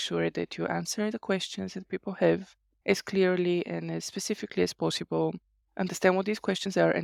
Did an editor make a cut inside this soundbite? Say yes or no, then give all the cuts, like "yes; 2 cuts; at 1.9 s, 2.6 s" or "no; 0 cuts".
no; 0 cuts